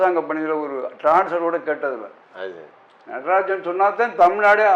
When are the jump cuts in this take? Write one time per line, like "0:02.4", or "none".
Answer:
none